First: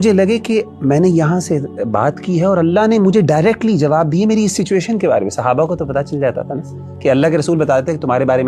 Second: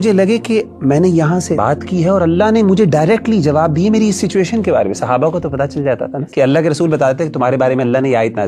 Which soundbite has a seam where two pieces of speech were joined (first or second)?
second